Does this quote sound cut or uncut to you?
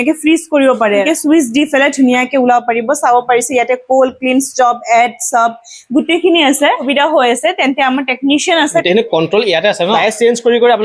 cut